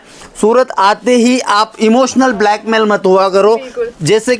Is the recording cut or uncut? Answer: uncut